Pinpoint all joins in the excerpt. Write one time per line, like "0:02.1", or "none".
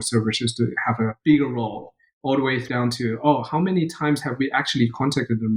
0:01.2
0:02.6